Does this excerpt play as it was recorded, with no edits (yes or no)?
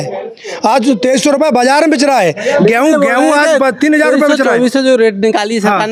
yes